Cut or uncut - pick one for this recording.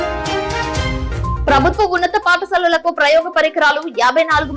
uncut